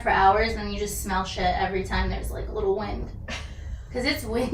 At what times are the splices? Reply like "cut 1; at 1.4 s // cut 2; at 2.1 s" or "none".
none